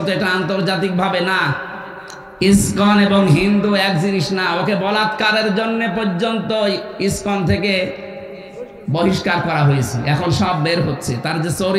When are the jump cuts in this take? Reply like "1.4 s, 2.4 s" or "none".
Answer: none